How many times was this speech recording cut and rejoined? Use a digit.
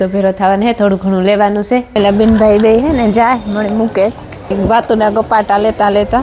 2